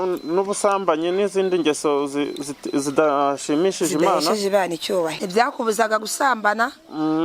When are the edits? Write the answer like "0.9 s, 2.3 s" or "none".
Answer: 5.2 s